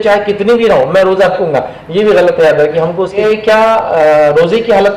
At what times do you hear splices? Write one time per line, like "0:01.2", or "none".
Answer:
0:03.2